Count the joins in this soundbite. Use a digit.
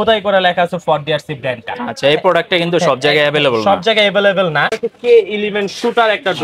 1